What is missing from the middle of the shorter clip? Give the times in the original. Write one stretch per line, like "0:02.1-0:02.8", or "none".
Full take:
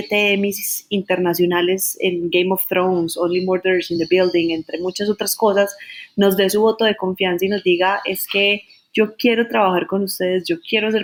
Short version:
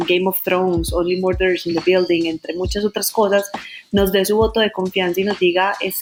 none

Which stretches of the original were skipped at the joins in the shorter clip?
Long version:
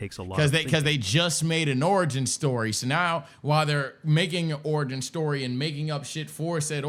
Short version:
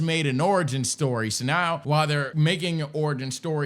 0:03.5-0:03.8

